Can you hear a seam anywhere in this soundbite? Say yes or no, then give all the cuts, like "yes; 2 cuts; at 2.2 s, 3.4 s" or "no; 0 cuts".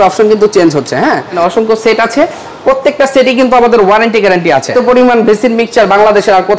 yes; 2 cuts; at 1.3 s, 4.7 s